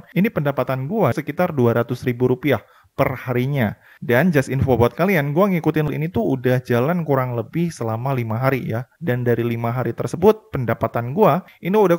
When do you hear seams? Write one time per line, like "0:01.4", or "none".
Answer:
0:01.1
0:05.9